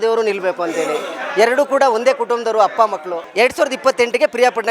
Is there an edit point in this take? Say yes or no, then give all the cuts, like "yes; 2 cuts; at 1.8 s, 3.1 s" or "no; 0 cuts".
yes; 1 cut; at 3.2 s